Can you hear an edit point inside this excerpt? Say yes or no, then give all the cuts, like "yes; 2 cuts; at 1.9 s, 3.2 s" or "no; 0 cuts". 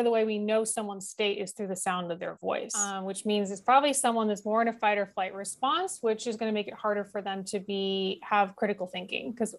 yes; 1 cut; at 3.1 s